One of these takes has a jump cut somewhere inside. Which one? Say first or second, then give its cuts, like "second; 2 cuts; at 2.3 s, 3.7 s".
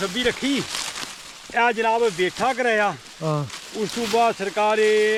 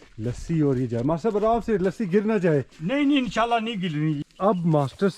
second; 1 cut; at 4.3 s